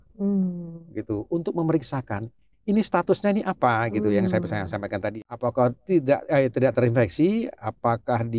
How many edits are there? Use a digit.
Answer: 1